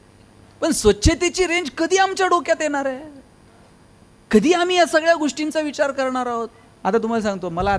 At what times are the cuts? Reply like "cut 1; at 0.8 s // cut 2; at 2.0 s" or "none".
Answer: cut 1; at 6.6 s